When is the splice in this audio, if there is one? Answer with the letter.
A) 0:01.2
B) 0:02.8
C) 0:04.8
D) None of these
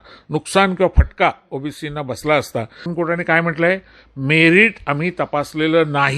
B